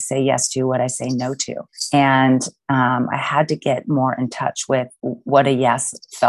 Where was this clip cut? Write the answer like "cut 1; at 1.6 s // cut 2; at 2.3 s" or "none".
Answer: cut 1; at 5.0 s